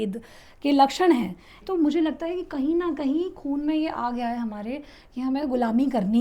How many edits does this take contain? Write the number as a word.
one